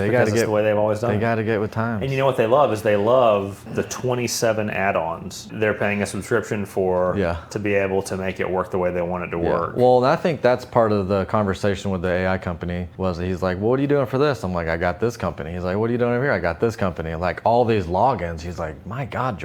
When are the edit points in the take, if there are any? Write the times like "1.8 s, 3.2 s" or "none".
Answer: 3.6 s, 5.5 s, 12.8 s